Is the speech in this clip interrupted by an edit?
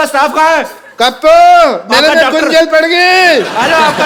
no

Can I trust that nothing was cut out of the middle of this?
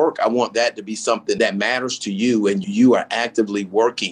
no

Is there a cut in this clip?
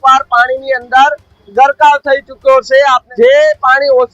yes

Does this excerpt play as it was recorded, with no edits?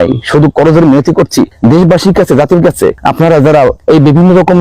no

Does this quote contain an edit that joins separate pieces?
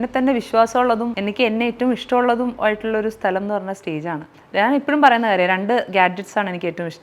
yes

